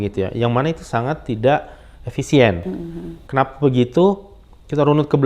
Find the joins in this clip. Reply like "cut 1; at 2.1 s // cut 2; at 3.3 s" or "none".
none